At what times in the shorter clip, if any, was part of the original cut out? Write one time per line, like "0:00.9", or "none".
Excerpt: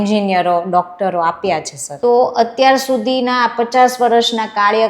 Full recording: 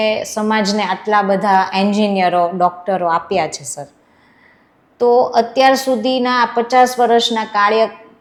0:01.8